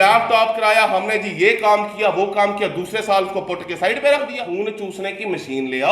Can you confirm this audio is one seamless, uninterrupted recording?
no; 1 cut; at 4.5 s

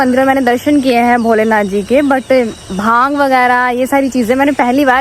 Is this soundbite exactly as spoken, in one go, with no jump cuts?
yes; 0 cuts

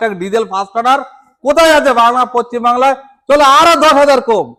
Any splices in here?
no; 0 cuts

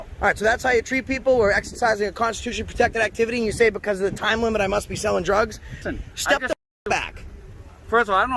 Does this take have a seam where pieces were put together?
no; 0 cuts

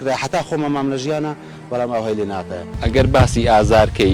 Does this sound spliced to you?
yes; 1 cut; at 2.6 s

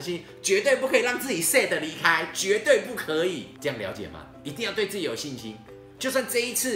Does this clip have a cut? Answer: yes; 1 cut; at 3.5 s

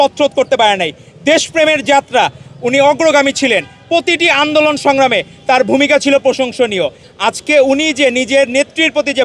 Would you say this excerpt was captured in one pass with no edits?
yes; 0 cuts

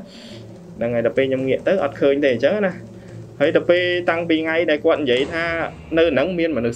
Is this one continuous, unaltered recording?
yes; 0 cuts

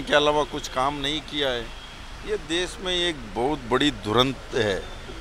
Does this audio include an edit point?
no; 0 cuts

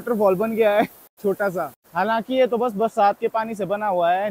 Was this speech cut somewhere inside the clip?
no; 0 cuts

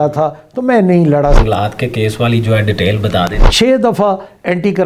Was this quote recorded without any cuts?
no; 2 cuts; at 1.4 s, 3.4 s

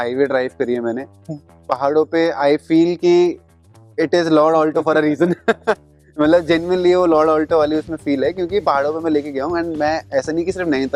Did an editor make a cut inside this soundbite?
no; 0 cuts

